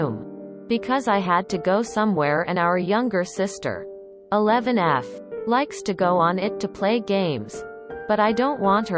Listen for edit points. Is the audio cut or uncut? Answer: cut